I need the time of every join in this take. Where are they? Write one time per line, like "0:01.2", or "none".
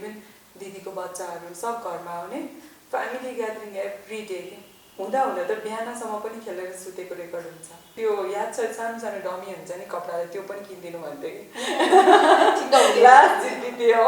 0:07.9